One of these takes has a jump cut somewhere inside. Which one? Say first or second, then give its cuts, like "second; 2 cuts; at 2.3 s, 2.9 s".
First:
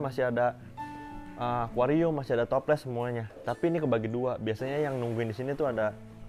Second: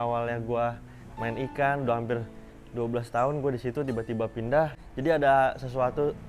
second; 1 cut; at 4.8 s